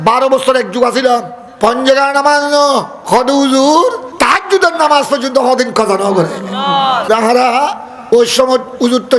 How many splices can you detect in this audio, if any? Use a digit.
5